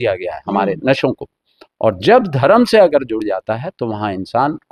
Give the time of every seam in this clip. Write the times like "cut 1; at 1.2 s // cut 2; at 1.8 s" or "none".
none